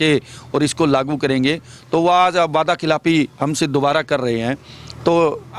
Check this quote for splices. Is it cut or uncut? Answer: uncut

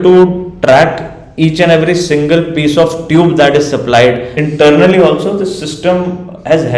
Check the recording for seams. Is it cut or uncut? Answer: cut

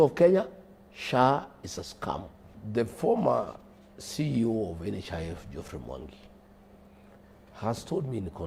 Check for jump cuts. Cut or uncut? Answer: uncut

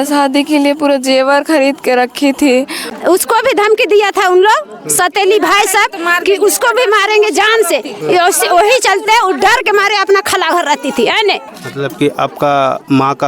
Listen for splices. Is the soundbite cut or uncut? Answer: cut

